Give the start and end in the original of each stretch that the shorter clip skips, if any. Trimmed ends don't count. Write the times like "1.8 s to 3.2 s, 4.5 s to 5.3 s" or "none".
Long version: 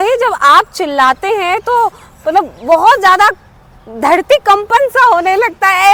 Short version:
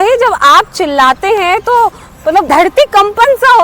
2.5 s to 4.0 s